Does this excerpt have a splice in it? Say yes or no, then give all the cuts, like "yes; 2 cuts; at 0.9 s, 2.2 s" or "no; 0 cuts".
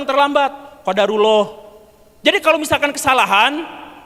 no; 0 cuts